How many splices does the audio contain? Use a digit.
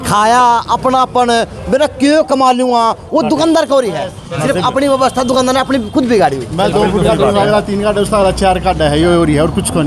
0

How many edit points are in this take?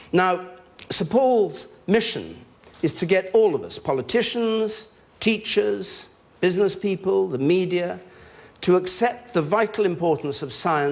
1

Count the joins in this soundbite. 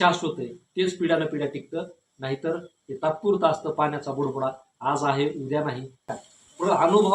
1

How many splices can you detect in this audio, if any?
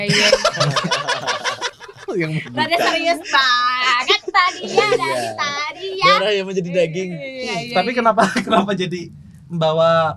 0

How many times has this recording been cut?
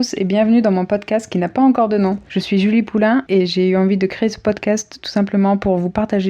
2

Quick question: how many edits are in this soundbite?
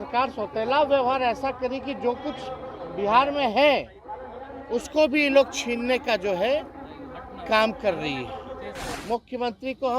1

